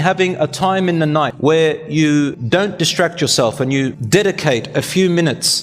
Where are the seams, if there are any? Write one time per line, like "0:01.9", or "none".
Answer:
0:01.3
0:02.4
0:04.0